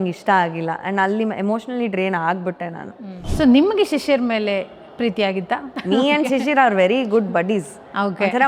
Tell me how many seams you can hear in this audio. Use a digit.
2